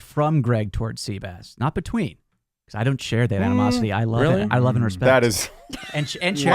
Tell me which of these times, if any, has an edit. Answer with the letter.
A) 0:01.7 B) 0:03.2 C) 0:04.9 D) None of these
D